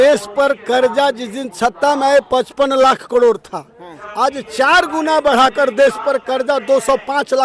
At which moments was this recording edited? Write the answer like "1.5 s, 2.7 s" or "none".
none